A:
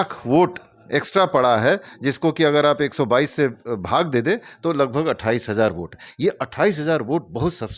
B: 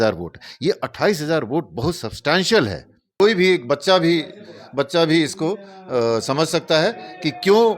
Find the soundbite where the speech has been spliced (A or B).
B